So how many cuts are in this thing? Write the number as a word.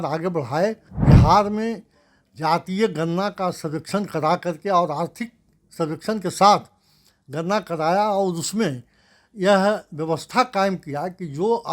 one